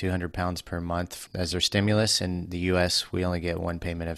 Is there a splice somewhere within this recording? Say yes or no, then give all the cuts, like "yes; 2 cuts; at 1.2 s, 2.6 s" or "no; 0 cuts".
yes; 1 cut; at 1.2 s